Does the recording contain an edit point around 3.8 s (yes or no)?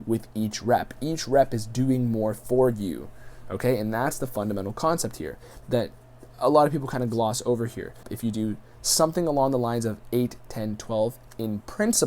no